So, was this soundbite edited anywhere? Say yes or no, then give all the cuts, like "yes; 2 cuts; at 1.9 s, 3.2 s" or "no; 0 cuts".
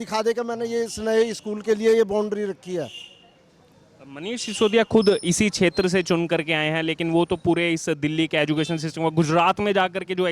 no; 0 cuts